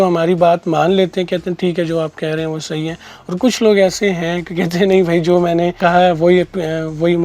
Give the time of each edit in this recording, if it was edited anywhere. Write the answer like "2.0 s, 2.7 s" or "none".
5.8 s